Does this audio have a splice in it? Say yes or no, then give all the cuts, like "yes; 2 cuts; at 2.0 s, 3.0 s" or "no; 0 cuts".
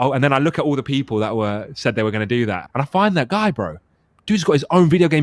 yes; 1 cut; at 2.6 s